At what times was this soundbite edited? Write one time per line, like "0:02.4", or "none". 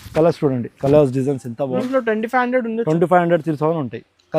0:01.8